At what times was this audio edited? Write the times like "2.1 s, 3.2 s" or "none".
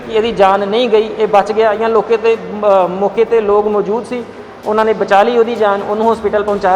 none